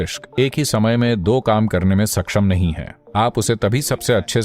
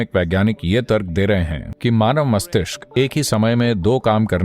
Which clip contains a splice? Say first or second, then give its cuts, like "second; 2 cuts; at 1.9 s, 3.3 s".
second; 1 cut; at 1.6 s